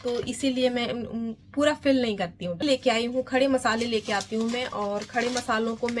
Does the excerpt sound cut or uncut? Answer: cut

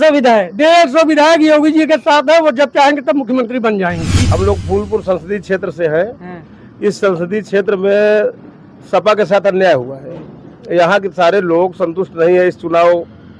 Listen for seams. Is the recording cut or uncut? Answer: cut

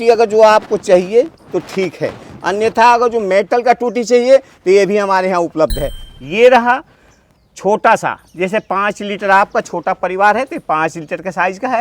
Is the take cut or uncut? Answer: cut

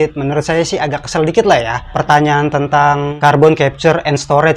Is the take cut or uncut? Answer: cut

